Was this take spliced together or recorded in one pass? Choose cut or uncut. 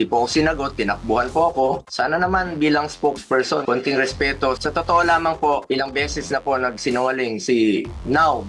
cut